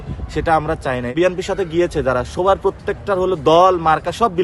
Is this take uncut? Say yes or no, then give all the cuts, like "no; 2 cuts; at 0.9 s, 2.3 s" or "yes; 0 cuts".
no; 1 cut; at 1.1 s